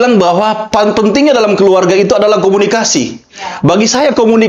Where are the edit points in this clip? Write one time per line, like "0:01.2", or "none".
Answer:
none